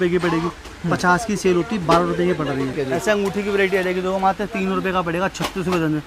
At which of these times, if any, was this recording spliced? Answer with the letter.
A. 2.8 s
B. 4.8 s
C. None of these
A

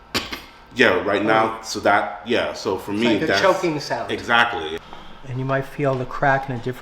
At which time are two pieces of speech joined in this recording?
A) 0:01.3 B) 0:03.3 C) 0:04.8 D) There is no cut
C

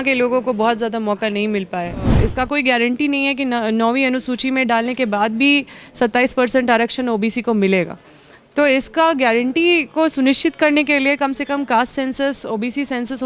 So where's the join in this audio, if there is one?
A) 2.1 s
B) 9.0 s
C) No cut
A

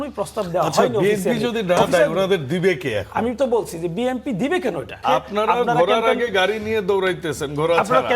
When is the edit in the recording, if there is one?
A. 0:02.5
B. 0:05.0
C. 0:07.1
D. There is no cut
B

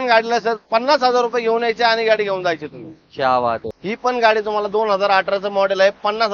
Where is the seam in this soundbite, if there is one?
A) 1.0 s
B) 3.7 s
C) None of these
B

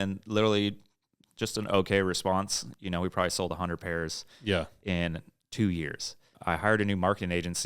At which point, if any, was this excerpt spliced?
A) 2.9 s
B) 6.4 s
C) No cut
B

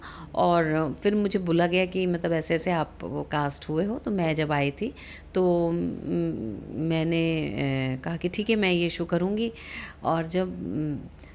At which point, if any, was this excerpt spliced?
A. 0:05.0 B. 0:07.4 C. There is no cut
C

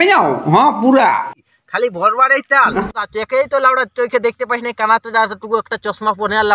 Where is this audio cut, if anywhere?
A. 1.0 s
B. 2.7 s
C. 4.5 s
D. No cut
B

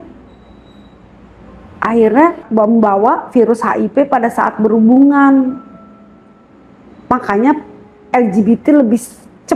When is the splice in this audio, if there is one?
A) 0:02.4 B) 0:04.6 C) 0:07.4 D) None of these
A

